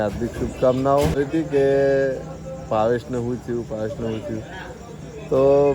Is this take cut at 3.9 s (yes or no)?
no